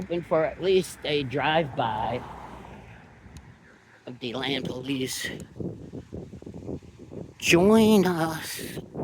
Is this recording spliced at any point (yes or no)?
no